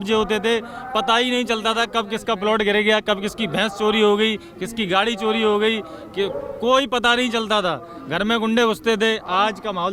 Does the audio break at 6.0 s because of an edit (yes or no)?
no